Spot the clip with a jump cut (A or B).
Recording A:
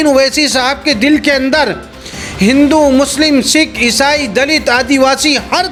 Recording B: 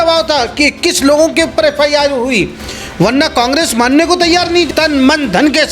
B